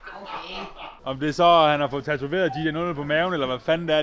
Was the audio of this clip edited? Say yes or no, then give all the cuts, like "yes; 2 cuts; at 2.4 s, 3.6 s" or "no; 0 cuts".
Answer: yes; 1 cut; at 1.0 s